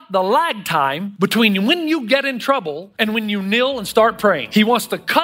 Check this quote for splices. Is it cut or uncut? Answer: cut